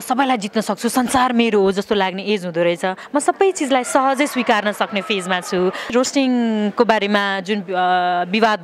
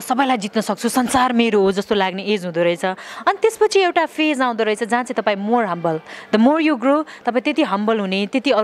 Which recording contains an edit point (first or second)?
first